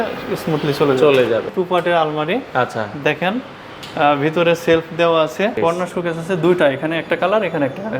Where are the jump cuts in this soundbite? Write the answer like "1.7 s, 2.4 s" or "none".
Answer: 1.5 s, 5.6 s